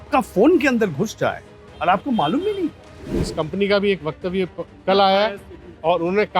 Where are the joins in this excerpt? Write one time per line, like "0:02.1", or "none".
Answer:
0:03.3

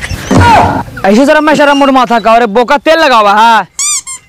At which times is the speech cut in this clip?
none

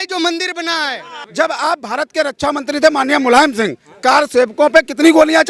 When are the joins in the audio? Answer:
0:01.2

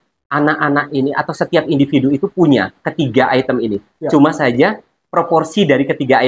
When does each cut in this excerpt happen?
none

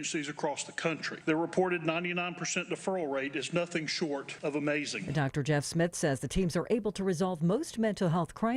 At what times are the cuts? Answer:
0:01.1
0:04.3

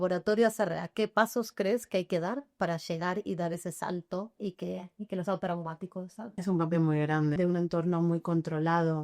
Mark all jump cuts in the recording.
0:06.3
0:07.4

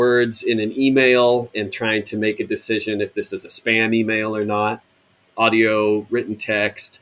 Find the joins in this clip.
0:04.9

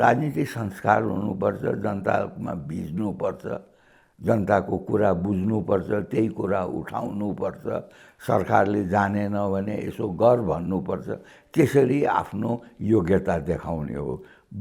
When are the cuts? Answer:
none

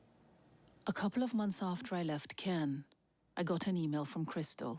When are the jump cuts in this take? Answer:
0:01.1
0:03.8

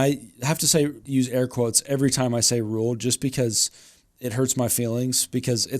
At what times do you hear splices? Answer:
0:01.0

